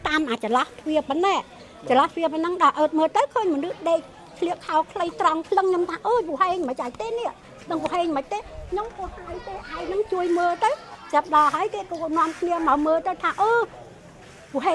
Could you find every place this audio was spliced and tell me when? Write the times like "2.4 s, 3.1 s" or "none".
none